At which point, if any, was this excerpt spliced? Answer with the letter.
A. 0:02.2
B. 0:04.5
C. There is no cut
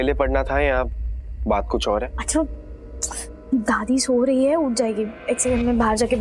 A